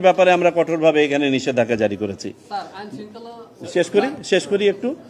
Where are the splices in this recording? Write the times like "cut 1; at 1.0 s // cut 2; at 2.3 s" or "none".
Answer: none